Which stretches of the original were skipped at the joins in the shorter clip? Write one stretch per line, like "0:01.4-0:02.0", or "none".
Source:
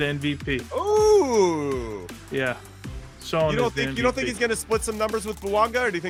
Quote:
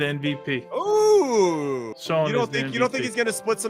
0:01.9-0:03.2